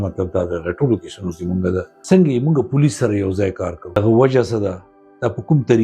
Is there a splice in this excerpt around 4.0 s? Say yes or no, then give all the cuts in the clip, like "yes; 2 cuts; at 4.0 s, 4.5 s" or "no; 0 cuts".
yes; 2 cuts; at 1.9 s, 4.0 s